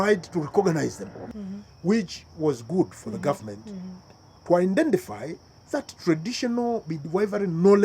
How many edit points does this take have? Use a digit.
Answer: 1